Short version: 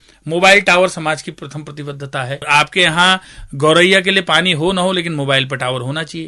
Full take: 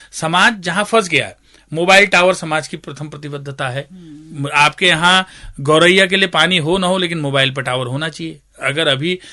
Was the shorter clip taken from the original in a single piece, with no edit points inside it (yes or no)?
no